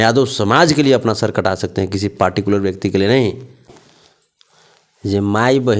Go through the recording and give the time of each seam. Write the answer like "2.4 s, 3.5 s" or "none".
3.7 s